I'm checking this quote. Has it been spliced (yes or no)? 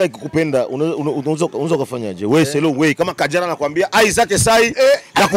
no